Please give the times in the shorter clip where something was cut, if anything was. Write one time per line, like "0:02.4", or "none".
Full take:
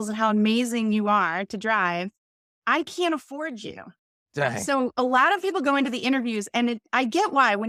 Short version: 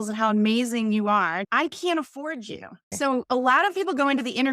0:01.5
0:02.9